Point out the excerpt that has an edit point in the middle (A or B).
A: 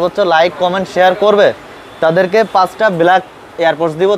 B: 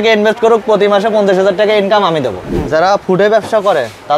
B